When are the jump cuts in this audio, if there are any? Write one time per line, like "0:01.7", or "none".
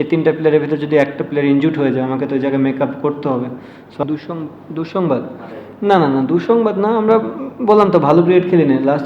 0:04.0